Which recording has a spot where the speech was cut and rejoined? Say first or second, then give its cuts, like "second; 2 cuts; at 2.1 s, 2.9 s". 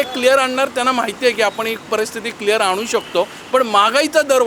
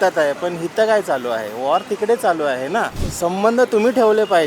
second; 1 cut; at 3.0 s